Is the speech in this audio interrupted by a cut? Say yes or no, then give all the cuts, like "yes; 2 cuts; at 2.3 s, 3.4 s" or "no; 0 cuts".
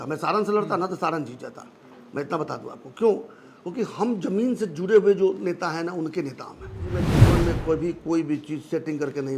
yes; 1 cut; at 7.1 s